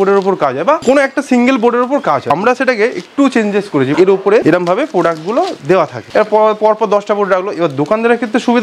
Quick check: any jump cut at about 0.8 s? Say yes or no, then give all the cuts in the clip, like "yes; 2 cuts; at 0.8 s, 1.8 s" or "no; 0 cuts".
yes; 4 cuts; at 0.8 s, 2.2 s, 4.1 s, 6.0 s